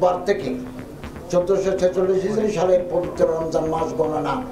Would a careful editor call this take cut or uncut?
uncut